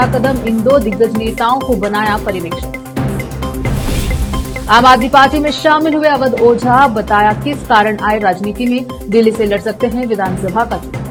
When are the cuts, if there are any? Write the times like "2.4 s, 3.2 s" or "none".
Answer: none